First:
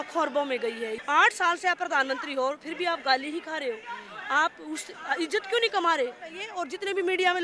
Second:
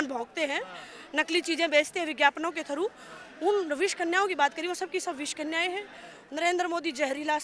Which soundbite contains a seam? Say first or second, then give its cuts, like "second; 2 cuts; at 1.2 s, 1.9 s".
first; 2 cuts; at 1.0 s, 6.5 s